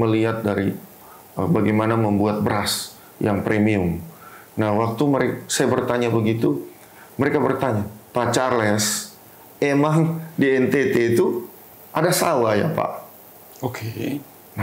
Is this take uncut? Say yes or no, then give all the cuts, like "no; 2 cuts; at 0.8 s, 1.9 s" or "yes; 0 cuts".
yes; 0 cuts